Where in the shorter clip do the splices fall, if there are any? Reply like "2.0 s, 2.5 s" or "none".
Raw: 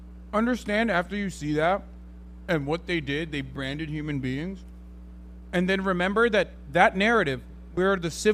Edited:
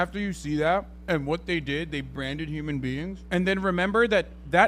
0.9 s, 3.2 s